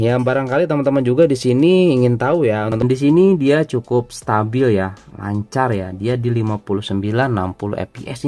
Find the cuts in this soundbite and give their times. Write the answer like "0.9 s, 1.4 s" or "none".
2.7 s